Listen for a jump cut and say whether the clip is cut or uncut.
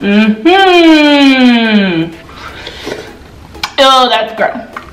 cut